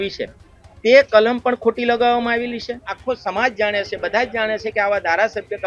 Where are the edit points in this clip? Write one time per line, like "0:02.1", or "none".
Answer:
0:02.9